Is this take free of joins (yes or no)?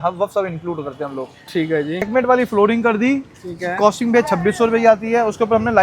no